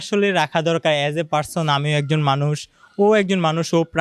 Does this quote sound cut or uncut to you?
uncut